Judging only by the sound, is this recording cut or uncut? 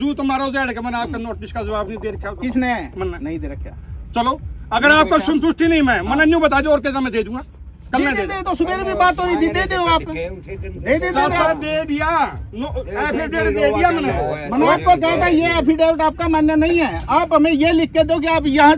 uncut